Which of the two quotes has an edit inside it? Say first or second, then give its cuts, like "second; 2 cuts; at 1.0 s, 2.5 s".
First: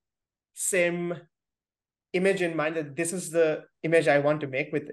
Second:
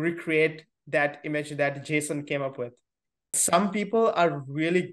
second; 1 cut; at 3.4 s